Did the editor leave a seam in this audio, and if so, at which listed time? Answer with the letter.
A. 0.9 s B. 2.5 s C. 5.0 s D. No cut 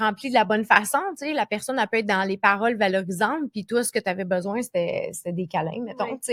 D